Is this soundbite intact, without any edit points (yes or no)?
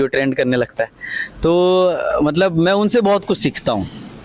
yes